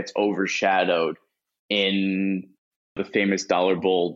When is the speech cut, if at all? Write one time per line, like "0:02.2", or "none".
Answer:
0:03.0